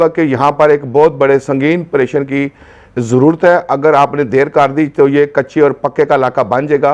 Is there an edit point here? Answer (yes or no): no